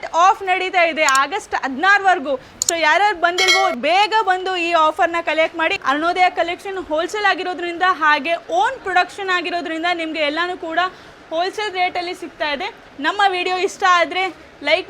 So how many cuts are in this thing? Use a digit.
2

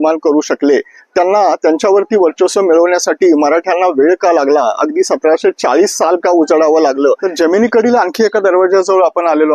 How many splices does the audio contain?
1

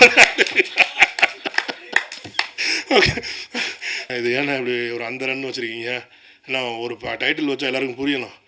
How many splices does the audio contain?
1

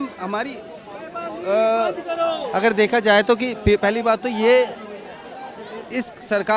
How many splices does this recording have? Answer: 0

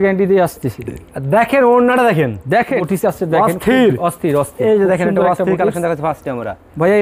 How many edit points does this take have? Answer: 1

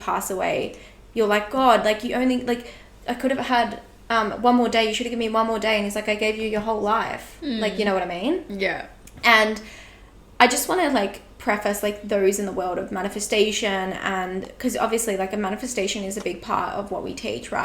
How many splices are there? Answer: 0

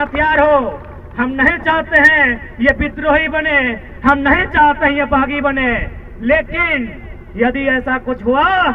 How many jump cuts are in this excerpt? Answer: 0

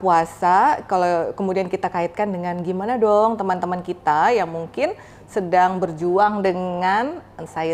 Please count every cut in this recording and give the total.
0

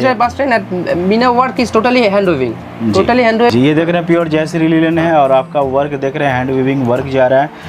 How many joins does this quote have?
1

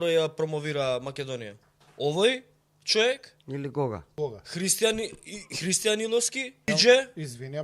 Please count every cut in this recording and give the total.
2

